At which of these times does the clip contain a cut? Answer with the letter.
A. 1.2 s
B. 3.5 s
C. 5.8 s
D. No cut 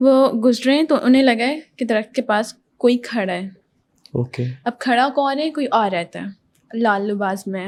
D